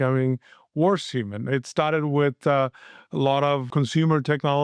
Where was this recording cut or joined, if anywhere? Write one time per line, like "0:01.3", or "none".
0:03.7